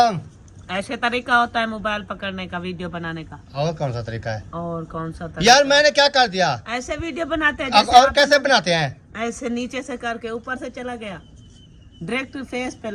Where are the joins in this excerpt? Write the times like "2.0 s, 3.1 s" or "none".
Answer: none